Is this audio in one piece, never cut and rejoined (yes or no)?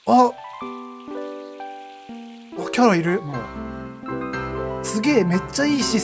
yes